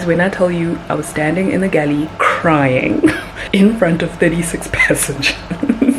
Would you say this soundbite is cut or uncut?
cut